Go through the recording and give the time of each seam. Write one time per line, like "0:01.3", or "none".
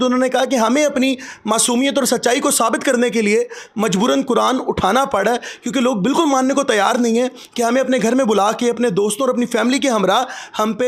none